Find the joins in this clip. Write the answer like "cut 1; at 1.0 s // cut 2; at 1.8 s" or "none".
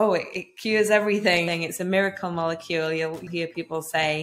cut 1; at 1.4 s // cut 2; at 3.3 s